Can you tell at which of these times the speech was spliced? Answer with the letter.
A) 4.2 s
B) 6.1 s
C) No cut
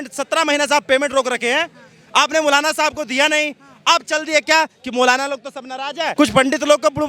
B